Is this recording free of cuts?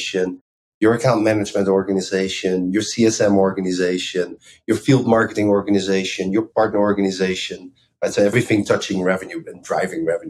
no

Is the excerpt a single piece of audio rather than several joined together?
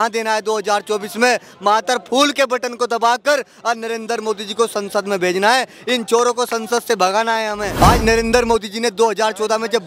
no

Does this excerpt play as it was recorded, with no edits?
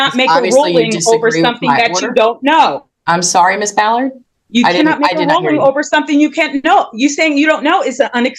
yes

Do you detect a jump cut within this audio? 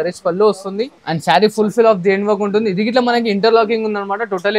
yes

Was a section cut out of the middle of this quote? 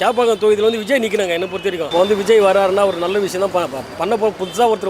yes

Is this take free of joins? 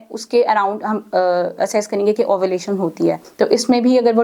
no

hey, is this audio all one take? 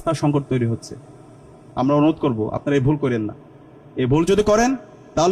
yes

